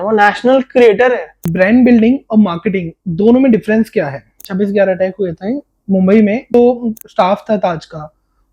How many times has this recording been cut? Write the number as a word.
three